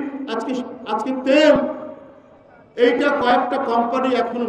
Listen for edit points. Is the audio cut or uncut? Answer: uncut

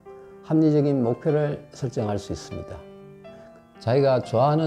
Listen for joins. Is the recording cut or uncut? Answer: cut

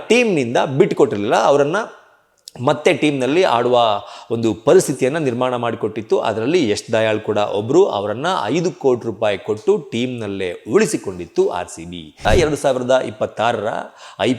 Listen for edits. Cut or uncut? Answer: cut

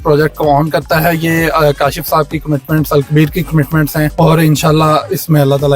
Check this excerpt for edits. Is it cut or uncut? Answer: cut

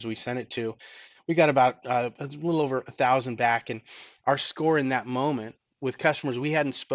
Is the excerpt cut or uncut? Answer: uncut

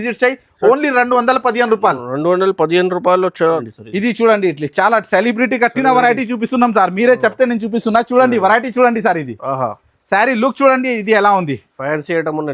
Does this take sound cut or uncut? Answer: cut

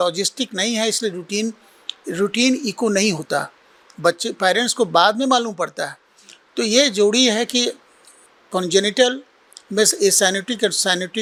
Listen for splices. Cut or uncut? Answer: uncut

